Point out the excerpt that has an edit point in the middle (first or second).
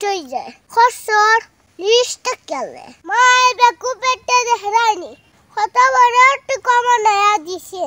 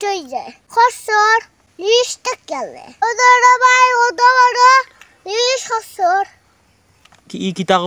first